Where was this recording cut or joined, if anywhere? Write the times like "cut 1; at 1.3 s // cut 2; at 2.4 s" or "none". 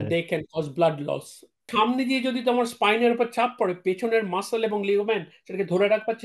cut 1; at 1.7 s